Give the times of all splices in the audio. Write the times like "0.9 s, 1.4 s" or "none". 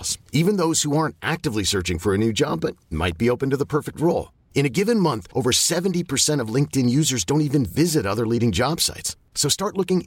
none